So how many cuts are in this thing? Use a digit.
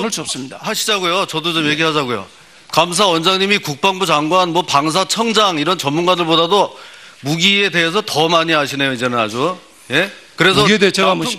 1